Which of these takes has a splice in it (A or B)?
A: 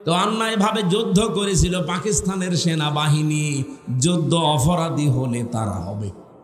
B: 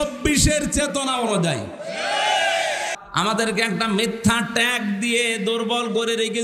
B